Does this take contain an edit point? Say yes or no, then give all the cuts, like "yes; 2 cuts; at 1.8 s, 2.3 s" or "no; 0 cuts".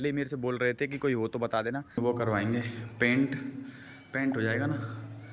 yes; 1 cut; at 2.0 s